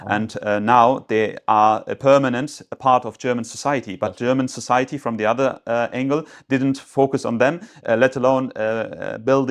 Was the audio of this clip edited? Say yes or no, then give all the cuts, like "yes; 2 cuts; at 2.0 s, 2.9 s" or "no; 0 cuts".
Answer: no; 0 cuts